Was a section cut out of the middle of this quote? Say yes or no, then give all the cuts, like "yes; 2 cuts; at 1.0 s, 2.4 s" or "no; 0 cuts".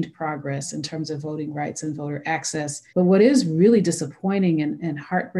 yes; 1 cut; at 2.8 s